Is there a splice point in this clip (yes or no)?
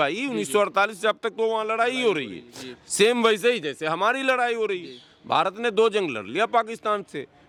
no